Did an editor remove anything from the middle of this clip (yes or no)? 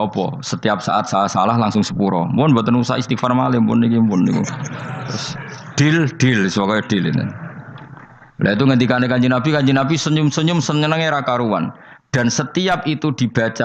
no